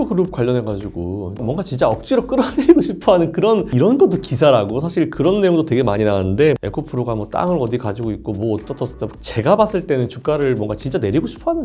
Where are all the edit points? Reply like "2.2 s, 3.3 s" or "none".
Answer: 1.4 s, 3.7 s, 6.6 s, 9.1 s

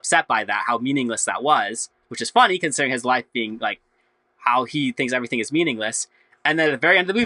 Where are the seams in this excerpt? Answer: none

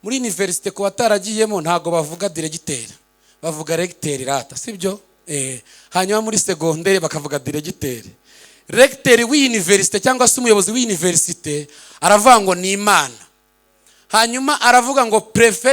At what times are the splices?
none

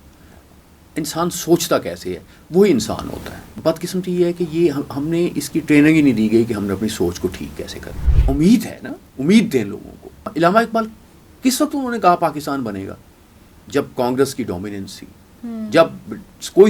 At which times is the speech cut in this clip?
3.6 s, 8.1 s, 10.3 s

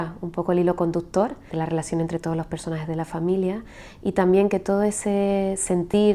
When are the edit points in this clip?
1.5 s

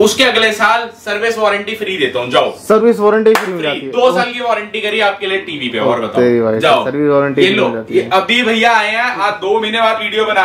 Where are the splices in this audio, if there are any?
none

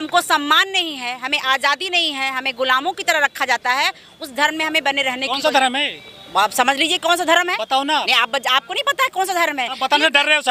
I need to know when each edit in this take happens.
none

